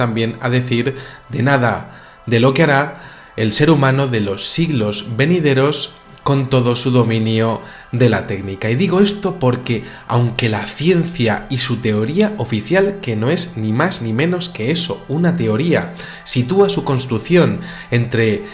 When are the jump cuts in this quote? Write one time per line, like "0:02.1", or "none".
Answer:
0:07.8

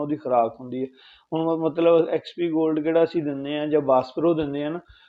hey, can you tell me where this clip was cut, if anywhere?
none

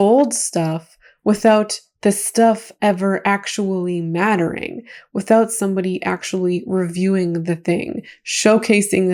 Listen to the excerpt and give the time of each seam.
none

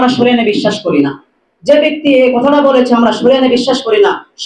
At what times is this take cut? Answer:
none

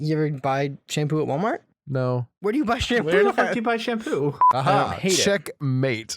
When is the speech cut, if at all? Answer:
0:04.5

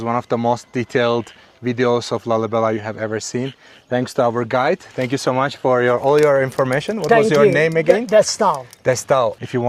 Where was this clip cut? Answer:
none

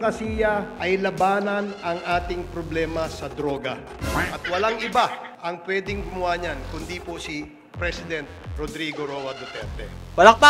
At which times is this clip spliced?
0:03.9

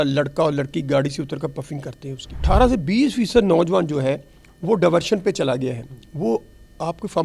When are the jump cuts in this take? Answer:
0:02.4

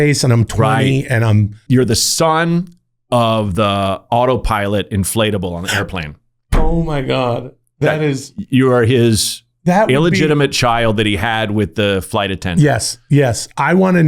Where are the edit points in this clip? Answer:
0:01.6

